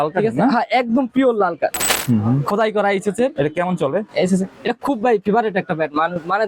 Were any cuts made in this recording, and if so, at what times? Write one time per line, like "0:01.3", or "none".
0:01.9